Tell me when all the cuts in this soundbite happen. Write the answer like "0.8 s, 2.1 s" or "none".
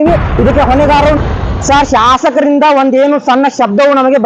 1.2 s